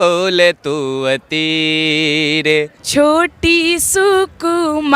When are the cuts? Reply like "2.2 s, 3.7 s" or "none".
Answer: 2.8 s